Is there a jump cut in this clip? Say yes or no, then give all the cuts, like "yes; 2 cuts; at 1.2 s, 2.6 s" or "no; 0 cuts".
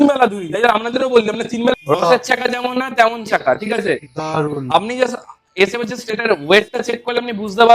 yes; 1 cut; at 1.7 s